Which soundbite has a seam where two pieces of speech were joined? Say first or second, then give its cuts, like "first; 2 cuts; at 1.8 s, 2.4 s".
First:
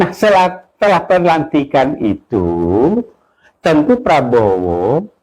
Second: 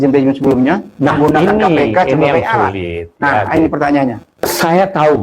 second; 1 cut; at 4.3 s